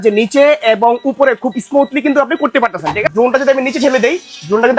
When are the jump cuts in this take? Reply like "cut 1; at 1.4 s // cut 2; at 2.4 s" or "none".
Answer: cut 1; at 3.1 s

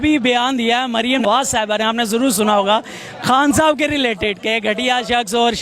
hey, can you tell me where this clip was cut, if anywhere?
cut 1; at 1.2 s

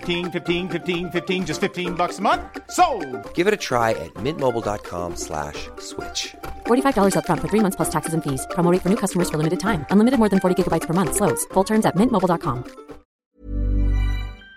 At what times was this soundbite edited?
cut 1; at 13.2 s

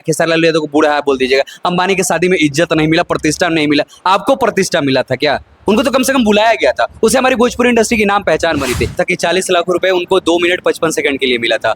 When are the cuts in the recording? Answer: cut 1; at 9.0 s

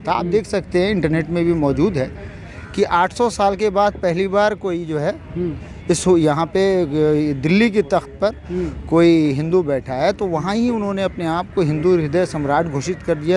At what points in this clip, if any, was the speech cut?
none

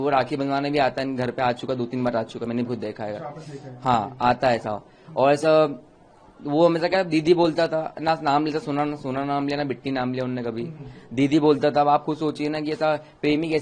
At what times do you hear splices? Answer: none

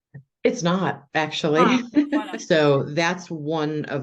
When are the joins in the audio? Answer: cut 1; at 2.3 s

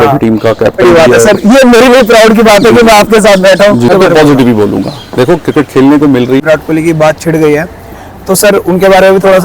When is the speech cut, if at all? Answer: cut 1; at 0.8 s // cut 2; at 3.9 s // cut 3; at 6.4 s

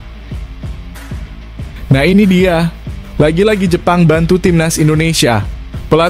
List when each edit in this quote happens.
cut 1; at 1.8 s

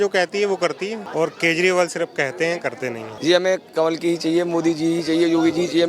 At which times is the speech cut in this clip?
cut 1; at 1.0 s // cut 2; at 3.1 s

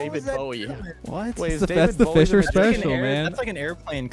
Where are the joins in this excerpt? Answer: cut 1; at 0.9 s

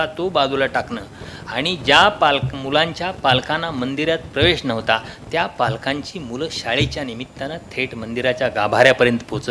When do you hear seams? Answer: none

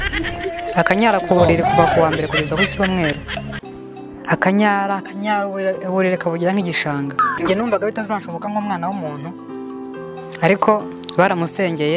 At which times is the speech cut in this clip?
cut 1; at 7.3 s

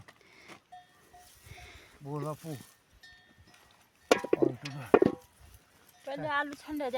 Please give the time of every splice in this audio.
none

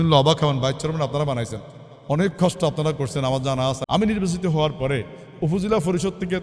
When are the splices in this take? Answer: cut 1; at 3.8 s

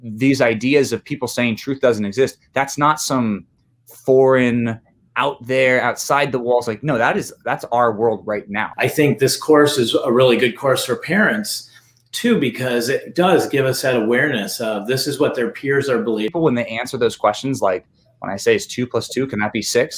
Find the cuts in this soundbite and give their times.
cut 1; at 8.6 s // cut 2; at 16.3 s

